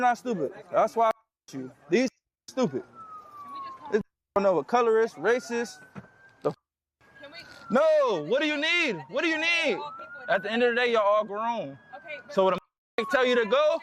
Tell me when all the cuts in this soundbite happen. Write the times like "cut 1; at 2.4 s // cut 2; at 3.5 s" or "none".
none